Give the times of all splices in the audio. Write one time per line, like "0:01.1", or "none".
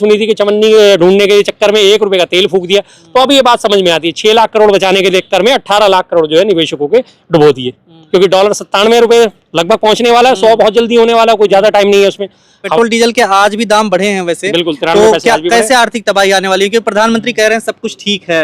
0:08.0
0:12.6